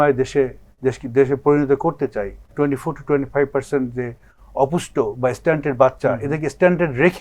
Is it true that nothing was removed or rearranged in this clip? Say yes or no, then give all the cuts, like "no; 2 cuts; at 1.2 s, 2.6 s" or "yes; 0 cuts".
no; 1 cut; at 2.4 s